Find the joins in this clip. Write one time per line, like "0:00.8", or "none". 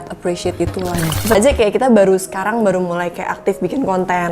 0:01.3